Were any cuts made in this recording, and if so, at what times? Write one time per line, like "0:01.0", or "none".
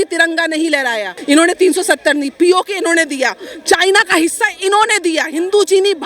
0:01.1